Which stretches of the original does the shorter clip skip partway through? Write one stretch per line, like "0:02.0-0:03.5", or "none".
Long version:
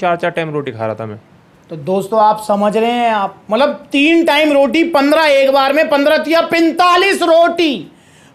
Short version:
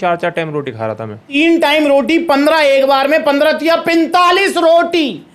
0:01.2-0:03.9